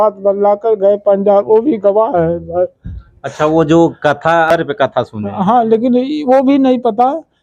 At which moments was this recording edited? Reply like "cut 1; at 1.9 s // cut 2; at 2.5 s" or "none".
cut 1; at 4.5 s